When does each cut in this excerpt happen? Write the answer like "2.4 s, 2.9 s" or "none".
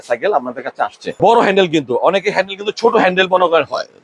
1.2 s